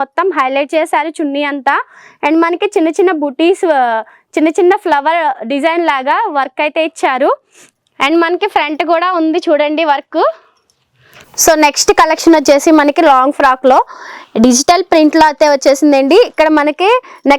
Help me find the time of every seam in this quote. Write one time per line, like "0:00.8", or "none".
0:11.3

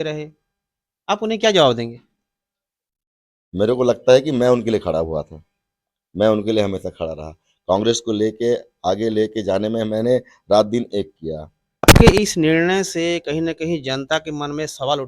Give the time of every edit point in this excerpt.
0:11.9

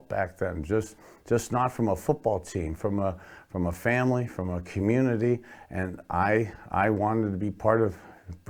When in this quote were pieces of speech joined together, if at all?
none

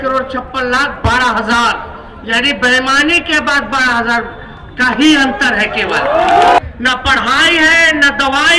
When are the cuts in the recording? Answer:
0:06.6

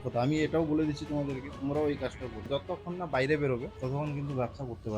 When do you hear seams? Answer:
0:02.4

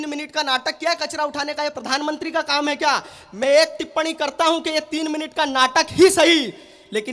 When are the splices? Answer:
none

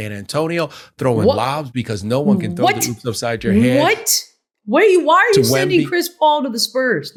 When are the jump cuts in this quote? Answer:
none

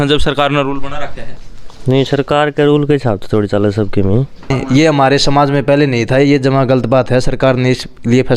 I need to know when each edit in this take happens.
0:04.6

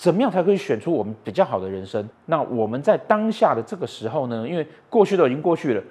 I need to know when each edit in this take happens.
0:02.1

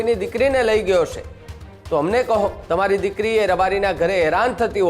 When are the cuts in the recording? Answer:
0:02.6

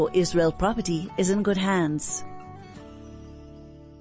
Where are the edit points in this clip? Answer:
0:02.0

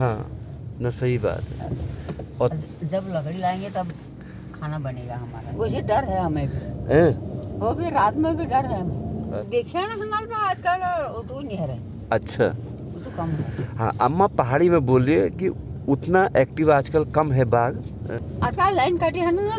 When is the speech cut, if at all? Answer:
0:05.5
0:09.3
0:18.1

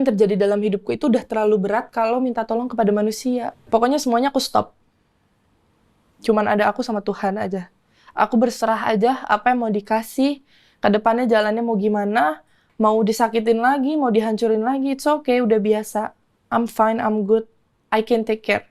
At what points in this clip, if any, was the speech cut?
0:03.6

